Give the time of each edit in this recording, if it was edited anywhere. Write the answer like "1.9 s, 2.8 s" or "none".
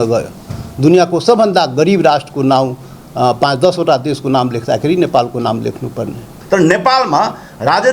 6.3 s